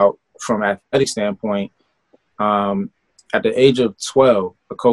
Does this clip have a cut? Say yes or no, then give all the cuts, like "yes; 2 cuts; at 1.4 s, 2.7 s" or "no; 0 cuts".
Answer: no; 0 cuts